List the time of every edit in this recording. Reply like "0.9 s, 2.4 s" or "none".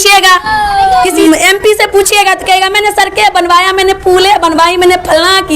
1.2 s